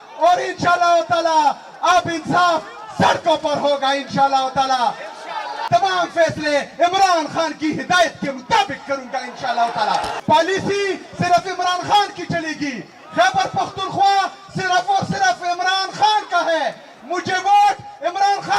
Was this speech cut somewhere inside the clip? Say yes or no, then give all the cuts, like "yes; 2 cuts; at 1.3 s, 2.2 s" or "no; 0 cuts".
yes; 2 cuts; at 5.5 s, 10.1 s